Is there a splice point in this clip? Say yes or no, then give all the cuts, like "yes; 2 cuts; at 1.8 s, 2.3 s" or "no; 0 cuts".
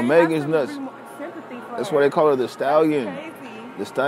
no; 0 cuts